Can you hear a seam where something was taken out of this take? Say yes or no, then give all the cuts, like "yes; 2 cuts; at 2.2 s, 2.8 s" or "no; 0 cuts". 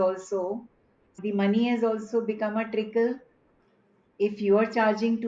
yes; 2 cuts; at 1.2 s, 3.5 s